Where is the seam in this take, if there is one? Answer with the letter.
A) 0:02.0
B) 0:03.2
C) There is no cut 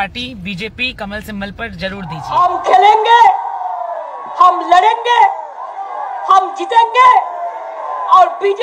A